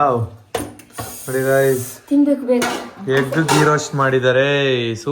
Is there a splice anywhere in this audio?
no; 0 cuts

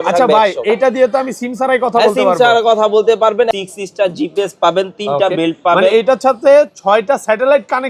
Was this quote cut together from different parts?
yes; 1 cut; at 3.5 s

